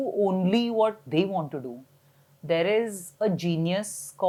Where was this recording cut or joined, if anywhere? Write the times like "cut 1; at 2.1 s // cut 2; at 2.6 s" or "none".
none